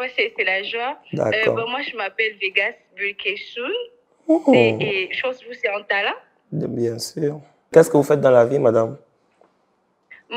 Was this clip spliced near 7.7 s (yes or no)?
yes